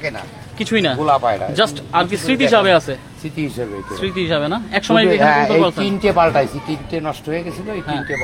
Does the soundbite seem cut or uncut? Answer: uncut